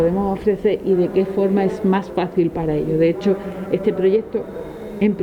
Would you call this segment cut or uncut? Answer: cut